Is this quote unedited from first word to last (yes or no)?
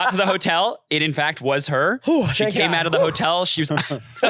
yes